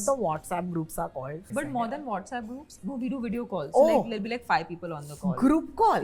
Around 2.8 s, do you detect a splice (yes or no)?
yes